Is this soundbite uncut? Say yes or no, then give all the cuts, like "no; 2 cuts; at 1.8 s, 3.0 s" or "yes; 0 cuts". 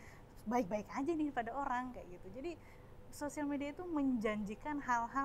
yes; 0 cuts